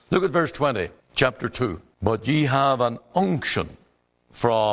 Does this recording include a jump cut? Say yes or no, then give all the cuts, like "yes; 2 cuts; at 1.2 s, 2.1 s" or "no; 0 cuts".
yes; 2 cuts; at 1.0 s, 1.9 s